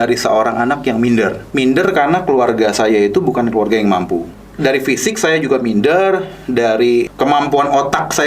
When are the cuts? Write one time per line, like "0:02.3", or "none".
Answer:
0:01.4
0:04.4
0:07.1